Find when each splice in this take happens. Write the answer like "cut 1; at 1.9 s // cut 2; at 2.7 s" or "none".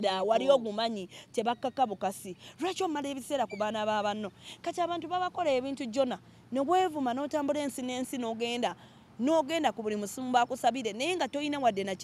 none